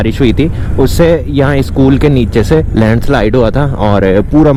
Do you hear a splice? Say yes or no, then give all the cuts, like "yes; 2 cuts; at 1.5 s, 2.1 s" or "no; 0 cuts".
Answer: no; 0 cuts